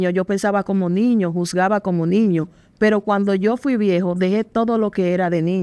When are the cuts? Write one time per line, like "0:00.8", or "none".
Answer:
none